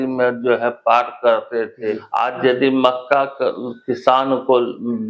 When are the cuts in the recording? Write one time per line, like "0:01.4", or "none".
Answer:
0:02.1